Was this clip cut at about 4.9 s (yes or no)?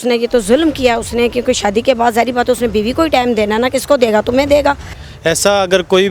yes